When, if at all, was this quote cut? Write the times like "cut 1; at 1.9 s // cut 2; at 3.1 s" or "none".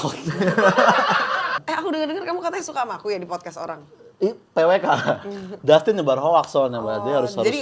cut 1; at 1.6 s